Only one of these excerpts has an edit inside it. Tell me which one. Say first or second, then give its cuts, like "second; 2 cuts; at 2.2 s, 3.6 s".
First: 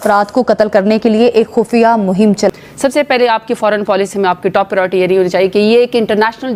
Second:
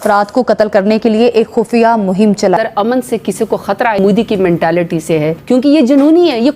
second; 3 cuts; at 2.6 s, 4.0 s, 5.4 s